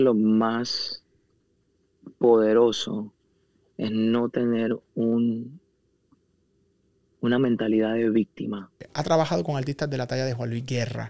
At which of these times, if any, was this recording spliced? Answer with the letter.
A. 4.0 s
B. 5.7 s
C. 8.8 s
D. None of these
C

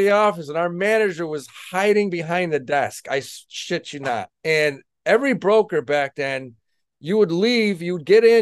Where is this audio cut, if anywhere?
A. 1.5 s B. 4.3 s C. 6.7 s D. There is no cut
B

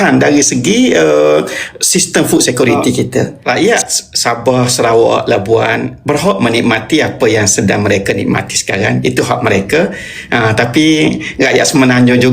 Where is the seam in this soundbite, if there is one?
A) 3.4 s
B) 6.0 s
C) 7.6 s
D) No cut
A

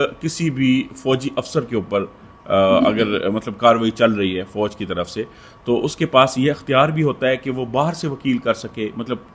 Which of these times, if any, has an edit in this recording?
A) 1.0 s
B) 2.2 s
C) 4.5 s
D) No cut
D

